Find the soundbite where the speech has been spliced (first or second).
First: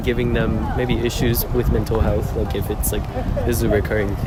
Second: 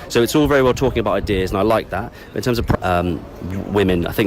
second